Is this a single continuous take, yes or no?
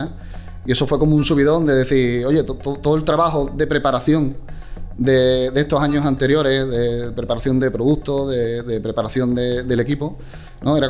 yes